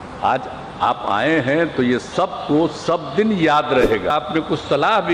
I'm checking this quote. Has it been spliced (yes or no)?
yes